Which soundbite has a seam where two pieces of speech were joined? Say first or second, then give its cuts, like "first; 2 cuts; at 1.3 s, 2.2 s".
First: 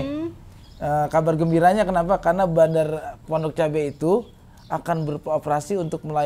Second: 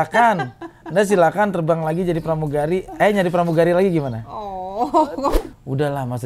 second; 1 cut; at 5.4 s